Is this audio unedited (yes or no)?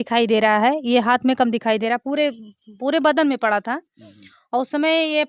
yes